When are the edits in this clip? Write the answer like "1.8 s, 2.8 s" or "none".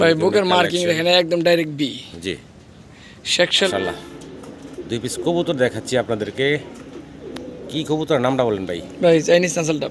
3.7 s